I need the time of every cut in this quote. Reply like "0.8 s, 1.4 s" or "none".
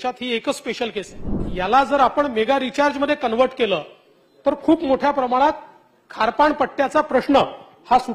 1.4 s